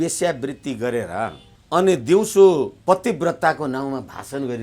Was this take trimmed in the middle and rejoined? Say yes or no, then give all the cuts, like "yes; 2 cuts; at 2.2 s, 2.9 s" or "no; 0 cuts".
yes; 2 cuts; at 1.5 s, 2.8 s